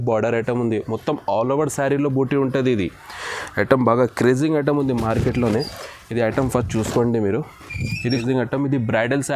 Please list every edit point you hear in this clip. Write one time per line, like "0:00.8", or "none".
0:08.1